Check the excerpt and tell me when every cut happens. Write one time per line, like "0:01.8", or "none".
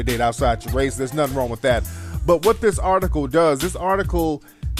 0:02.9